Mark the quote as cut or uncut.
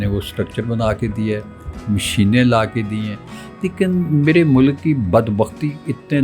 uncut